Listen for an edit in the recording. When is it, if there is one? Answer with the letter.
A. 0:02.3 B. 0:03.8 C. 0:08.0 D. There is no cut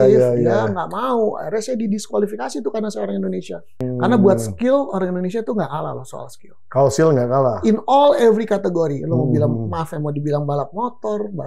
B